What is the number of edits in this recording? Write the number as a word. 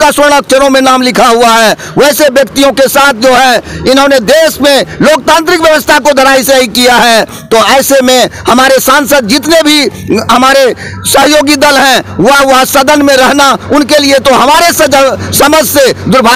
zero